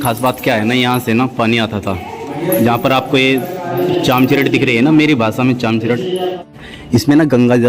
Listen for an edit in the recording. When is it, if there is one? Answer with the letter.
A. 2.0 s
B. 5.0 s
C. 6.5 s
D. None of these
C